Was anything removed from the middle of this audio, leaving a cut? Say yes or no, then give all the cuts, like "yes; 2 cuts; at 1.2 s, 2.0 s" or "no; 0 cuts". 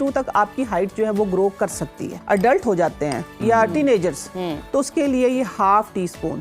yes; 1 cut; at 2.1 s